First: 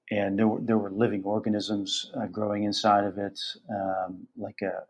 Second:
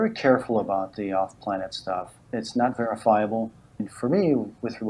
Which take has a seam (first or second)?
second